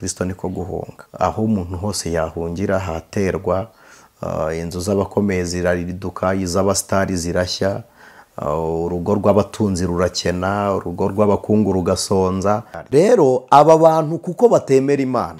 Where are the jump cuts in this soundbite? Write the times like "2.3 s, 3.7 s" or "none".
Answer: 1.0 s, 12.7 s